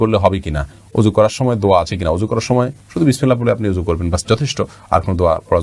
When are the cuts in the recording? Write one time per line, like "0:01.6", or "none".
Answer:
none